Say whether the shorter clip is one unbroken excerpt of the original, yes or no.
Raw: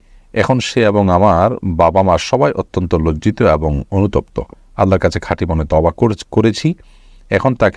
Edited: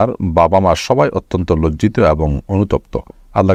yes